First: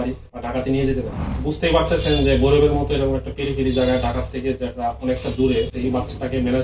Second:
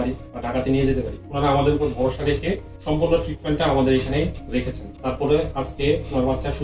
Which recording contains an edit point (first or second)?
first